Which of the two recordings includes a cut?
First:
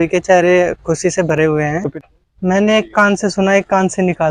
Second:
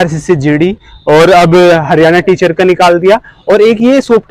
first; 1 cut; at 1.8 s

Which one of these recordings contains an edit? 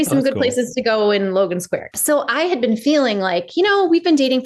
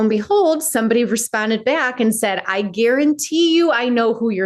first; 1 cut; at 1.9 s

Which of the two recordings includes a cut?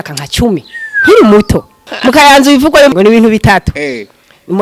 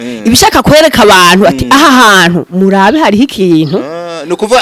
first; 2 cuts; at 1.9 s, 2.9 s

